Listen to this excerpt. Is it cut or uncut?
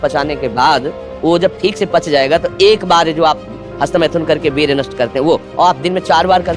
uncut